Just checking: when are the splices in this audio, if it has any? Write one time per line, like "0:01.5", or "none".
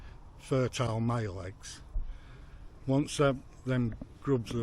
none